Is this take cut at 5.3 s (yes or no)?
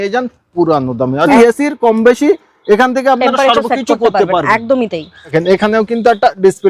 yes